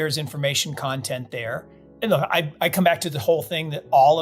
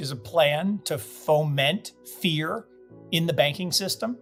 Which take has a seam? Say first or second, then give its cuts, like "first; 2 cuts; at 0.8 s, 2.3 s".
first; 1 cut; at 1.8 s